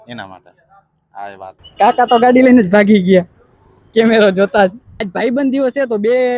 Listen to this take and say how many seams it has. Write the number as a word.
two